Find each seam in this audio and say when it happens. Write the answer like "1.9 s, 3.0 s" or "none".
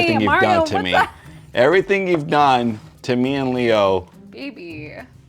4.1 s